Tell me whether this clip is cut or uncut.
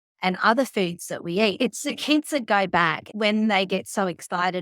cut